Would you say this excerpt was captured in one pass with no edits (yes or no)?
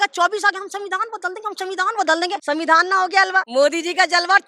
no